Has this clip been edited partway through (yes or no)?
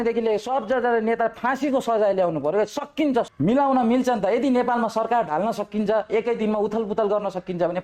yes